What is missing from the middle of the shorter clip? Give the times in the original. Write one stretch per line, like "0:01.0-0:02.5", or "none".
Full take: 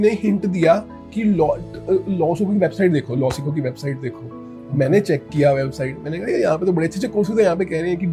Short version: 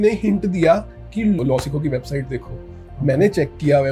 0:01.4-0:03.1